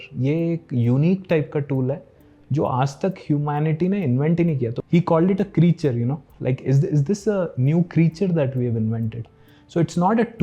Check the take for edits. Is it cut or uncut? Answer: cut